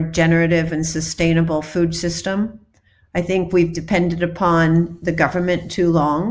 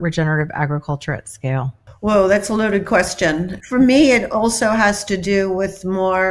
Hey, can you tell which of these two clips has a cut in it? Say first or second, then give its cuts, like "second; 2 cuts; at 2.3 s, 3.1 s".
second; 2 cuts; at 1.8 s, 3.5 s